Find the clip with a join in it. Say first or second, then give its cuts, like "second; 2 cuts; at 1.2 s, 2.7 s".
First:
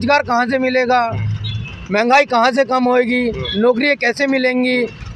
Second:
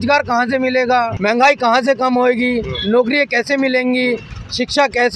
second; 1 cut; at 1.1 s